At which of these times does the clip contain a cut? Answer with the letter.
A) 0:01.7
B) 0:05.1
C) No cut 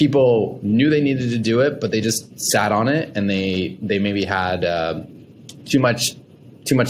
C